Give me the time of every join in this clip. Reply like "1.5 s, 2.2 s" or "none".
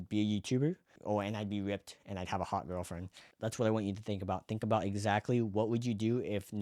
1.0 s, 3.2 s